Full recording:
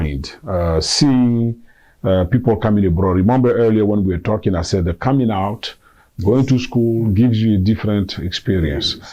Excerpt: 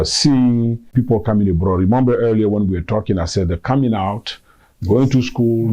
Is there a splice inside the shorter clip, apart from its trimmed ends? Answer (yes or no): yes